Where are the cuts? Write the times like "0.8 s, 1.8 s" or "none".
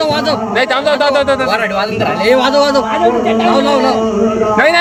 none